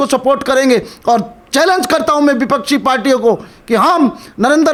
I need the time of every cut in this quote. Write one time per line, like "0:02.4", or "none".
none